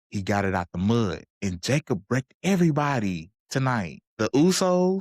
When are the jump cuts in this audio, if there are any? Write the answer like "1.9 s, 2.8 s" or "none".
1.3 s, 4.0 s